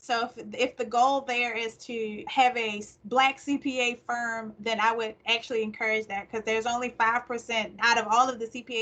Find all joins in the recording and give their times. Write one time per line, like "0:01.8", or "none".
0:02.2
0:07.7